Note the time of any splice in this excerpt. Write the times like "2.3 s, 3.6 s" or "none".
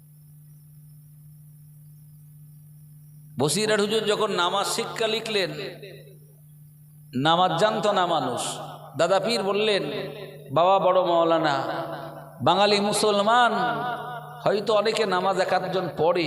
none